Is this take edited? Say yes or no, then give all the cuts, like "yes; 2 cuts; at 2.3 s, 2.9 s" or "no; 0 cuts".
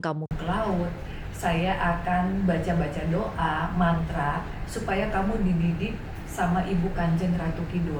no; 0 cuts